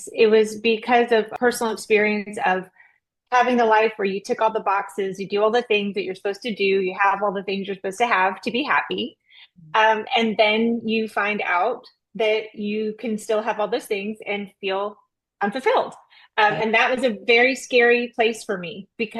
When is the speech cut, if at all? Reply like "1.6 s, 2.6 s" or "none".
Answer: none